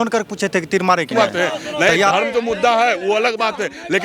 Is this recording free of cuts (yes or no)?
no